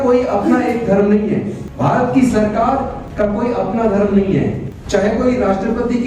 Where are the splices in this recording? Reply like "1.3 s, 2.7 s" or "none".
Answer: 1.6 s, 3.0 s, 4.7 s